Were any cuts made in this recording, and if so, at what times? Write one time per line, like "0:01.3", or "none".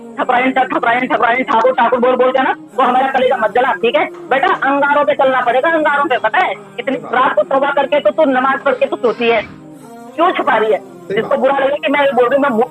0:04.2
0:06.9
0:11.0